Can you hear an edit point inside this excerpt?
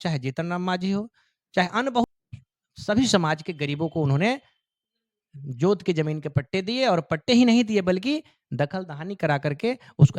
yes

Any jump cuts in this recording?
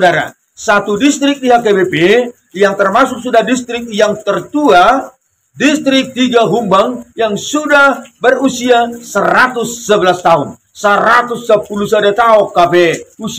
no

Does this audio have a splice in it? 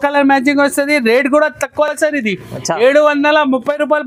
no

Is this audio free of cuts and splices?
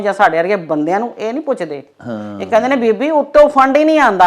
yes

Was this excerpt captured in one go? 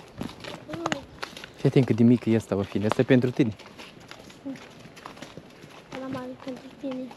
yes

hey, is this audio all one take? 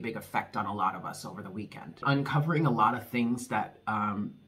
no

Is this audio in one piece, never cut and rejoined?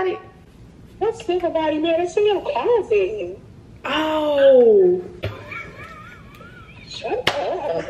yes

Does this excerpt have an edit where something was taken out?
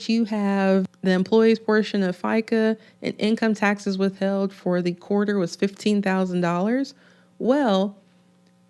yes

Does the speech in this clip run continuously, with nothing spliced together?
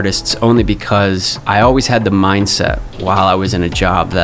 no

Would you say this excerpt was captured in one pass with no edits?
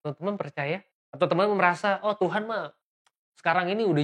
no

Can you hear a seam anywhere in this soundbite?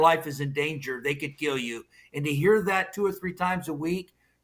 no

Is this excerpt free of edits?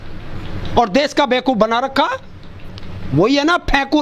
yes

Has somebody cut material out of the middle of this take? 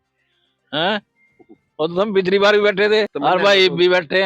yes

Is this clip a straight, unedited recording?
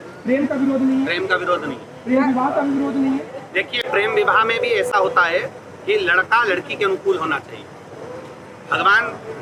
yes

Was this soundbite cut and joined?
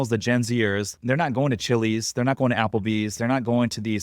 yes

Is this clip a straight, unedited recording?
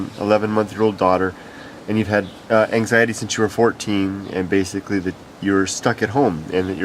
no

